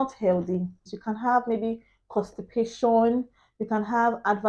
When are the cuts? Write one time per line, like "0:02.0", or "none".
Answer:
0:00.9